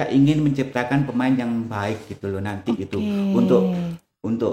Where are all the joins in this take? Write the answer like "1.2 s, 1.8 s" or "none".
none